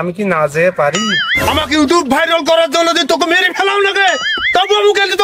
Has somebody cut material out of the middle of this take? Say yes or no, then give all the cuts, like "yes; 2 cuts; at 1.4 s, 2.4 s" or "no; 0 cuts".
yes; 1 cut; at 1.1 s